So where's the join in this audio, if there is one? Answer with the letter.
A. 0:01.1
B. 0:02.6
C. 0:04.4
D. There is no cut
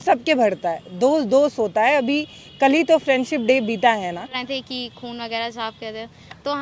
C